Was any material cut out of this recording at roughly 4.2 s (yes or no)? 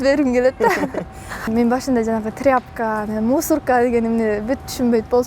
no